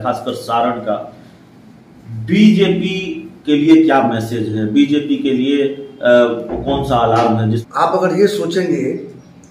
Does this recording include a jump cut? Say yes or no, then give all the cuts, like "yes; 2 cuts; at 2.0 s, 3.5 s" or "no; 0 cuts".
yes; 1 cut; at 7.6 s